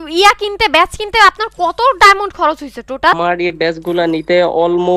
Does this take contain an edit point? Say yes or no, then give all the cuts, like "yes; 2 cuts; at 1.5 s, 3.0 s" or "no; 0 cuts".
yes; 1 cut; at 3.1 s